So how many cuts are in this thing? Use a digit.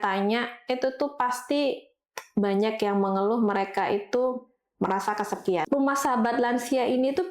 1